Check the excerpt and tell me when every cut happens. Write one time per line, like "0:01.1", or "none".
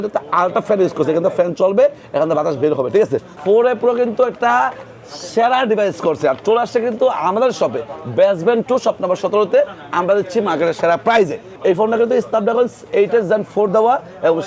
0:03.3
0:11.5